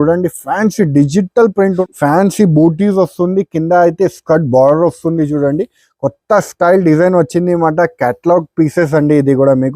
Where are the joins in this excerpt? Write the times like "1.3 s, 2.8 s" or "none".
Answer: 1.9 s